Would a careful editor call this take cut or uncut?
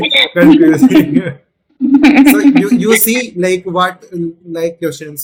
uncut